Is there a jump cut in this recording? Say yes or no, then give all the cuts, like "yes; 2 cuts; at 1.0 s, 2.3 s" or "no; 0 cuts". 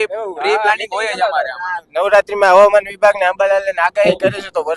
no; 0 cuts